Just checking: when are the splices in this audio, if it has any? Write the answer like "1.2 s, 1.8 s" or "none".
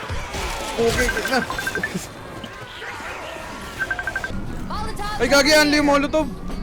4.3 s